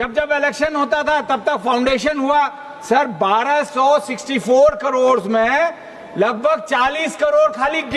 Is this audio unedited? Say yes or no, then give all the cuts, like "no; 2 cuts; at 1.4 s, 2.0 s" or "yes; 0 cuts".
yes; 0 cuts